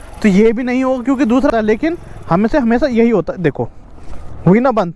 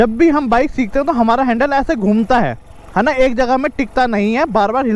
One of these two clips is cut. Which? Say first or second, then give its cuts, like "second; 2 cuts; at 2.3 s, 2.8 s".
first; 1 cut; at 1.5 s